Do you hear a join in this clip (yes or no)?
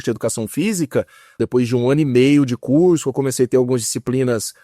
yes